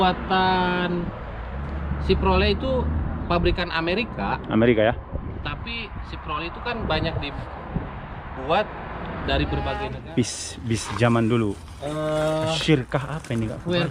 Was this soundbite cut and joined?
yes; 1 cut; at 9.9 s

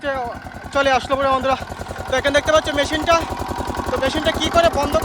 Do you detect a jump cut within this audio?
no; 0 cuts

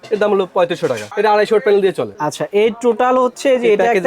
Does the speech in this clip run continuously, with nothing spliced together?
no; 1 cut; at 2.2 s

